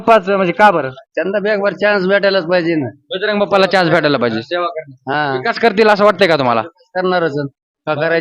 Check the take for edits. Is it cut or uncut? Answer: uncut